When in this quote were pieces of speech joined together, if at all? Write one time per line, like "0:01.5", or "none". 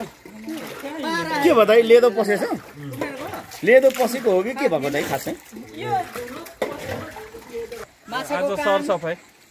0:07.8